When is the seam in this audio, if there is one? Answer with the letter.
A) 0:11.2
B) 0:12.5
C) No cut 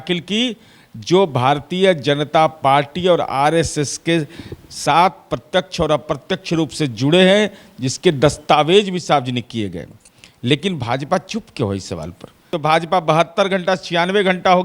B